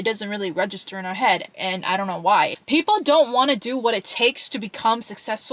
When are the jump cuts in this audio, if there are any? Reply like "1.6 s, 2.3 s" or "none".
2.6 s